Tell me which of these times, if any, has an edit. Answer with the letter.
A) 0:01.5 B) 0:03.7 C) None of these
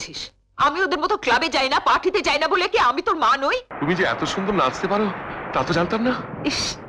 B